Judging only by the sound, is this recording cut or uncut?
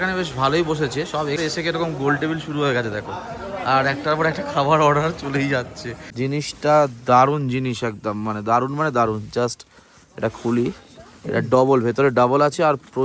cut